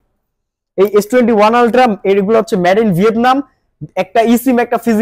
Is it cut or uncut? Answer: uncut